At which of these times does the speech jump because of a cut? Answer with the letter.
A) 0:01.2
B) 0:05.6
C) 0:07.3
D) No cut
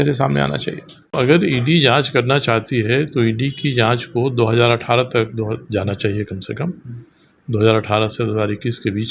A